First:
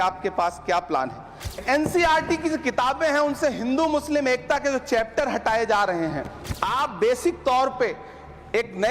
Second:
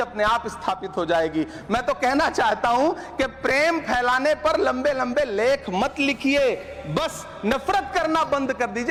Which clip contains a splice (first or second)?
first